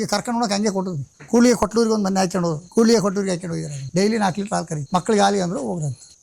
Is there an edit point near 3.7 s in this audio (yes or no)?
yes